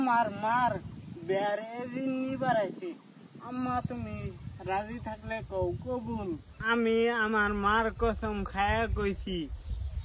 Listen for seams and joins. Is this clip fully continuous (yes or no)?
no